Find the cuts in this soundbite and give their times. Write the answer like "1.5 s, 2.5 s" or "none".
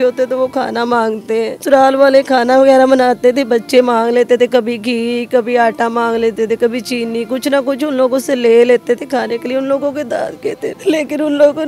1.6 s, 10.8 s